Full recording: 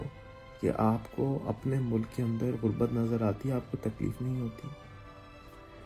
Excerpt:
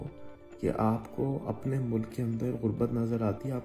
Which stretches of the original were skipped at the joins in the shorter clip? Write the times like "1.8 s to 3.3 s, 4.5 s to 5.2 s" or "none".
none